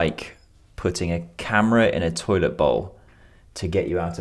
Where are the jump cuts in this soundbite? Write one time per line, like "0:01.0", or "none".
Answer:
none